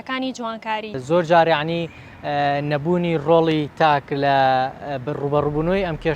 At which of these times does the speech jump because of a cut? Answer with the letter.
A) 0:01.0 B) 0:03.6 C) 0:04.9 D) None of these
A